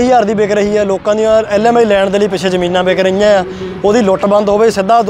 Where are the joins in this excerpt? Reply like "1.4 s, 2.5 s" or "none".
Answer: none